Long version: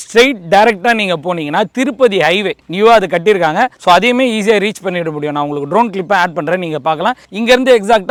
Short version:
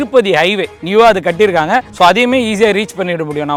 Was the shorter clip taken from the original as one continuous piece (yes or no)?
yes